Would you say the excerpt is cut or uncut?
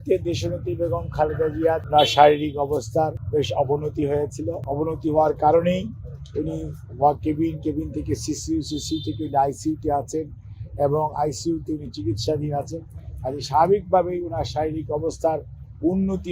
cut